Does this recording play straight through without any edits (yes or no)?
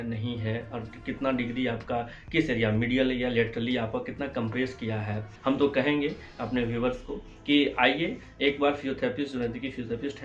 no